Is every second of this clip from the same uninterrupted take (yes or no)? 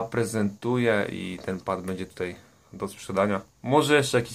yes